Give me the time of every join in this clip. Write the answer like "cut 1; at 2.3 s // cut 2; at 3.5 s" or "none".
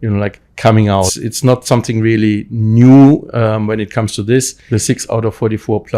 cut 1; at 1.2 s // cut 2; at 4.6 s